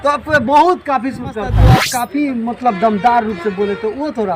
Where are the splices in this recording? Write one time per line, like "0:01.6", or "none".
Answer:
0:01.6